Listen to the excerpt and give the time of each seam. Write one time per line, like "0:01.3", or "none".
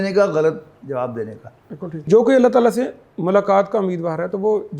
0:02.1